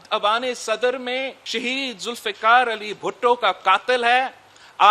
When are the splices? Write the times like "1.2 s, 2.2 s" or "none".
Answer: 1.4 s